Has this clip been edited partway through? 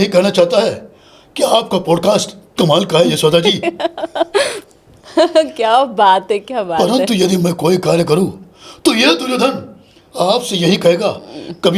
no; 0 cuts

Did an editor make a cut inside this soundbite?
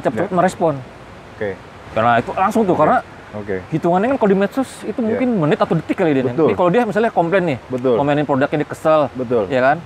no; 0 cuts

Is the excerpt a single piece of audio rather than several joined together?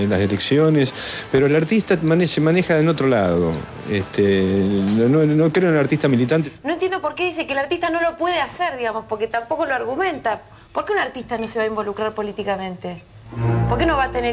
no; 1 cut; at 6.5 s

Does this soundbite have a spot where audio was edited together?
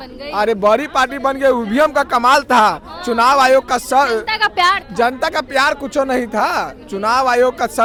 no; 0 cuts

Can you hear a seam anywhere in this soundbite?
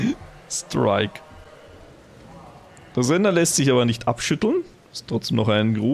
no; 0 cuts

